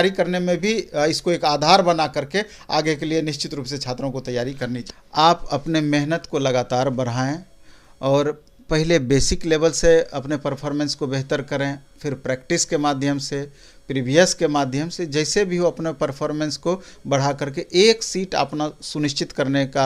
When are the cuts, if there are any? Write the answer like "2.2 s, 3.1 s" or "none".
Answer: 4.8 s